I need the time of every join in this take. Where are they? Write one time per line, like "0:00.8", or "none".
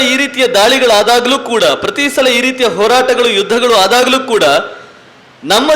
none